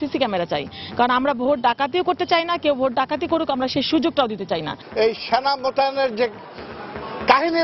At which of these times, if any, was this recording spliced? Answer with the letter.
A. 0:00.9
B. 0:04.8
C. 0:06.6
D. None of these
B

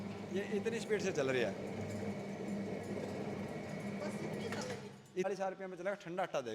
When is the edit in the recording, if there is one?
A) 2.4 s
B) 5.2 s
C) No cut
B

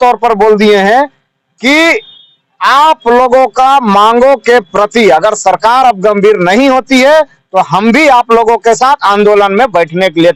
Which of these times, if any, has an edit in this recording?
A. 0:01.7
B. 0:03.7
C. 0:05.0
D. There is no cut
D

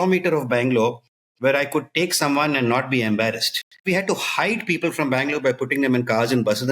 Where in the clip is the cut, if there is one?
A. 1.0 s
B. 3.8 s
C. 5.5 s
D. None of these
B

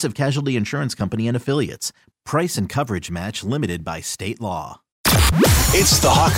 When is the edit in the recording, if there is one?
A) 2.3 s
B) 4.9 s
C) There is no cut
B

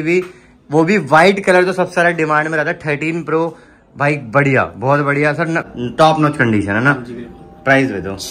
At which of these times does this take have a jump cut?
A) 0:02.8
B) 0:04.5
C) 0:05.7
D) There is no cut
C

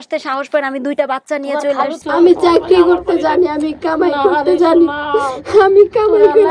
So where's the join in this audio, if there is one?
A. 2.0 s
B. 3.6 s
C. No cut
A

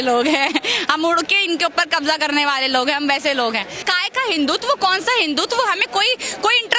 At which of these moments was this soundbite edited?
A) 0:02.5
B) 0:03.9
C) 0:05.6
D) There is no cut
B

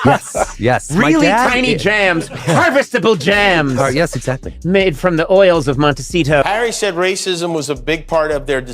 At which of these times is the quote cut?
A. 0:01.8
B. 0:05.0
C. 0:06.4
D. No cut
C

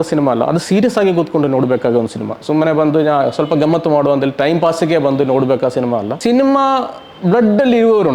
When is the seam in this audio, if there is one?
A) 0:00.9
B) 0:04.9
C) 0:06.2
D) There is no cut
C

